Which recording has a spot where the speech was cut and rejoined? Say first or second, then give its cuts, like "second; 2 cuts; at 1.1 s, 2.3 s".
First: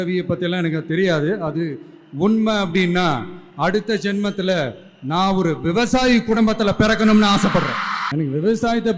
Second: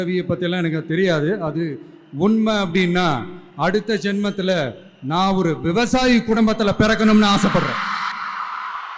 first; 1 cut; at 7.9 s